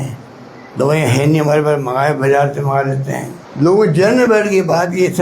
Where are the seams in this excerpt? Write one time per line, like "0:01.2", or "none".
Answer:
0:03.4